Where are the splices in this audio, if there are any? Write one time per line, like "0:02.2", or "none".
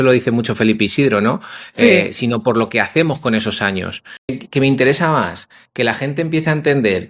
0:04.4